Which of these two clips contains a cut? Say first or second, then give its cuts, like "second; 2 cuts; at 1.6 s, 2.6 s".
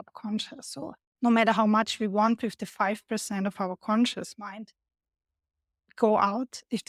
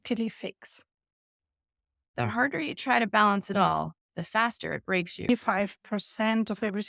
second; 2 cuts; at 2.1 s, 5.3 s